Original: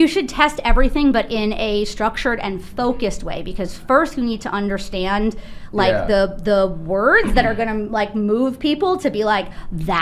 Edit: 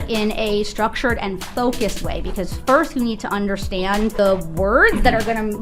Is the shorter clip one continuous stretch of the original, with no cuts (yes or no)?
no